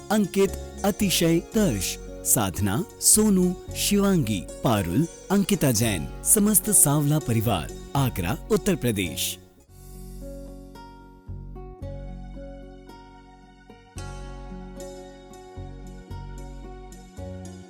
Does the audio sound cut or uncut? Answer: cut